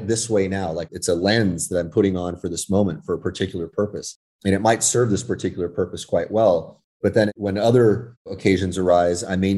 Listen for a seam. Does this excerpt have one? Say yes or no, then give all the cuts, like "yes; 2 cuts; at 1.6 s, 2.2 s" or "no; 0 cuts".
yes; 2 cuts; at 7.1 s, 8.3 s